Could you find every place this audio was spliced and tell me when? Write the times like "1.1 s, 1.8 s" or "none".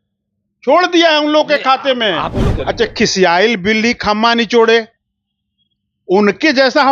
2.4 s